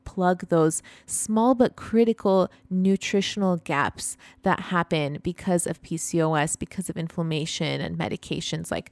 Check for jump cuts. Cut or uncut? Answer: uncut